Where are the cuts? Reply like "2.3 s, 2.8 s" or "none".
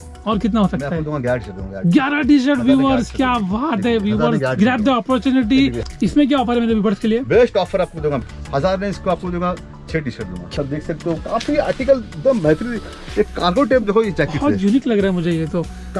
5.8 s, 8.2 s, 9.9 s